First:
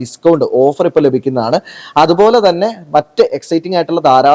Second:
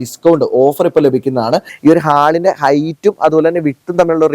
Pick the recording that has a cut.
second; 1 cut; at 1.7 s

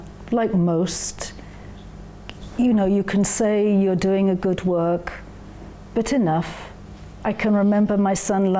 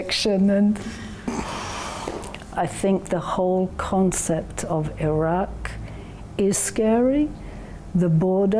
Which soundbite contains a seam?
second; 1 cut; at 2.6 s

